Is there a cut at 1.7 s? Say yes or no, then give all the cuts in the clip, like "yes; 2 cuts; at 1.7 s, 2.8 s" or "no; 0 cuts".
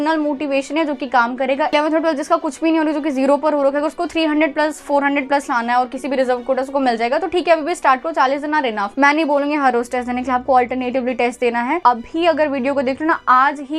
yes; 3 cuts; at 1.7 s, 8.9 s, 11.8 s